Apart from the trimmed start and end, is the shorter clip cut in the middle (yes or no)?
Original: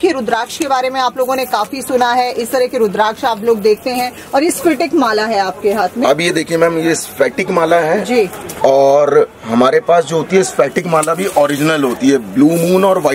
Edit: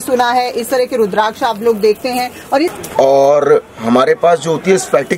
yes